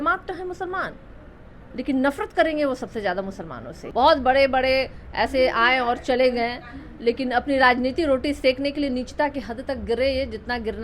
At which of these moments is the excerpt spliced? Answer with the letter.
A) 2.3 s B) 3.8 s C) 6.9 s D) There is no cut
B